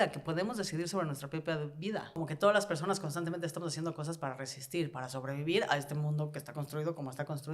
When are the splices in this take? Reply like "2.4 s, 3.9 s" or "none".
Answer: 2.2 s